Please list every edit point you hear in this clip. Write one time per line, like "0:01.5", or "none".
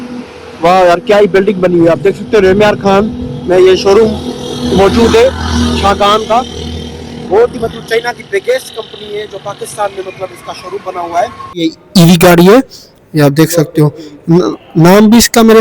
0:11.6